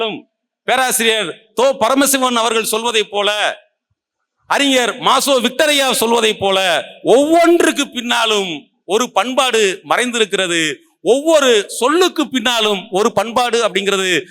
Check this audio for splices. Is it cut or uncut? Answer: uncut